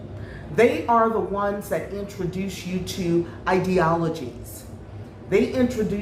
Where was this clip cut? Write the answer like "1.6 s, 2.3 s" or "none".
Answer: none

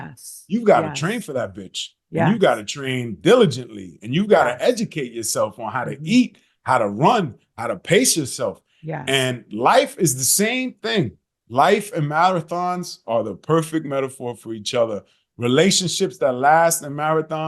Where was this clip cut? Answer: none

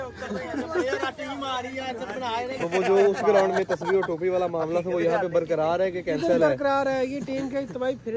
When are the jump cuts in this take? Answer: 2.6 s

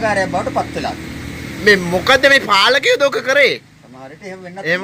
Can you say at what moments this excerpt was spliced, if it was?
none

